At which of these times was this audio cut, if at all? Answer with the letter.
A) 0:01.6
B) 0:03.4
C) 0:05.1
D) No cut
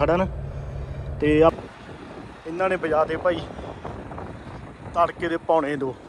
A